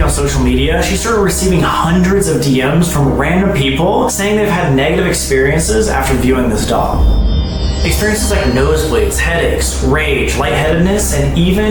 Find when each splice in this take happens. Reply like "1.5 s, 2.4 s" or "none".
none